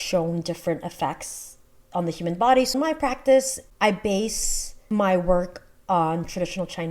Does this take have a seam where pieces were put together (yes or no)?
yes